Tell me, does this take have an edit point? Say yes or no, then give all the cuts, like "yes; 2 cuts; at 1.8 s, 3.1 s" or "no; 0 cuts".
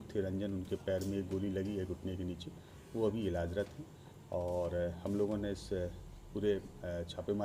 no; 0 cuts